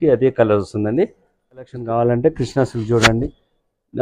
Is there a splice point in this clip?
yes; 1 cut; at 1.8 s

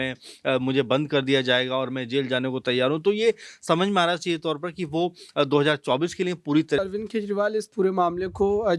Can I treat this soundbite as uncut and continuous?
no; 1 cut; at 6.8 s

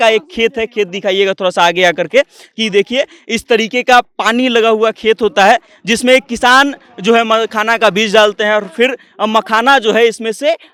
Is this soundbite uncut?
yes; 0 cuts

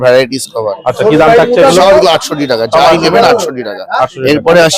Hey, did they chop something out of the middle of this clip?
no; 0 cuts

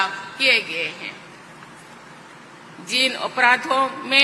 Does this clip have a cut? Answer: no; 0 cuts

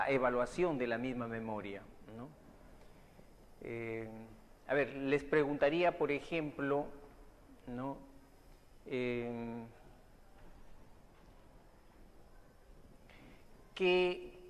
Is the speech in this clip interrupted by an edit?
no; 0 cuts

